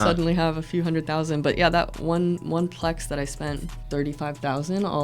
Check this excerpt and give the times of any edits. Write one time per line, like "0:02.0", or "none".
0:03.8